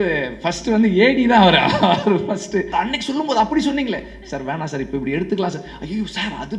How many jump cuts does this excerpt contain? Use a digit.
1